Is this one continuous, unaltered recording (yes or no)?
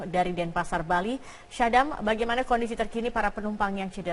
yes